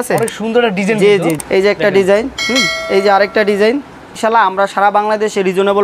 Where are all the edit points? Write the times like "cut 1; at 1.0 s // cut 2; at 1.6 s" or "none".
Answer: cut 1; at 1.4 s // cut 2; at 2.8 s // cut 3; at 4.2 s